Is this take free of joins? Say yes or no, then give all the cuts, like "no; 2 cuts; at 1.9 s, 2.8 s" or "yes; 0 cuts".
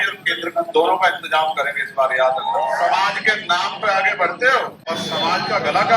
no; 2 cuts; at 2.7 s, 4.8 s